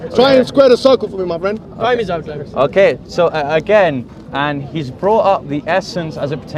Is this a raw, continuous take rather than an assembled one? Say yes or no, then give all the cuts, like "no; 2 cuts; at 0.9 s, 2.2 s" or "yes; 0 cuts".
yes; 0 cuts